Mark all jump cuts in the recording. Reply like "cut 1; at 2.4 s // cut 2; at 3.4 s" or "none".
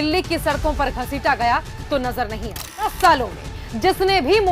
cut 1; at 2.8 s